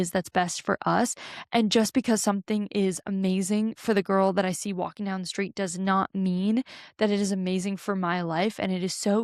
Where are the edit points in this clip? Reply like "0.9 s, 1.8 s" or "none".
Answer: none